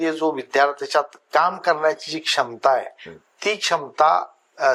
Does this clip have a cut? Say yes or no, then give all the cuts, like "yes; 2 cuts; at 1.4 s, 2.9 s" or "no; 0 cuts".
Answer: no; 0 cuts